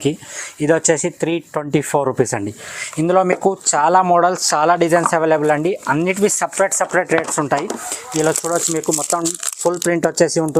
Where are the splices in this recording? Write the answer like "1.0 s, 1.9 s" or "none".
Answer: none